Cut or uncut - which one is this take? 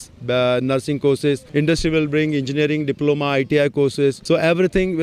cut